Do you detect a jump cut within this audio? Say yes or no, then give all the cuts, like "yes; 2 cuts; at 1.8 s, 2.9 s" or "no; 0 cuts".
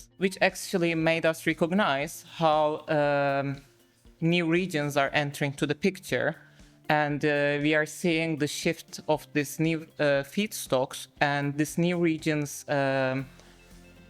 no; 0 cuts